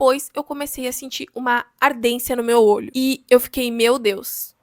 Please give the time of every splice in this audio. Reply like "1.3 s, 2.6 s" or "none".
2.9 s